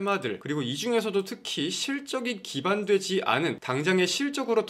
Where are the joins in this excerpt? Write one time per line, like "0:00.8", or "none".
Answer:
0:03.6

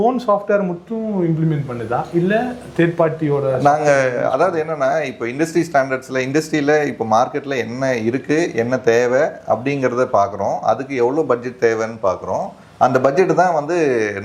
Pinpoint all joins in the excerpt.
none

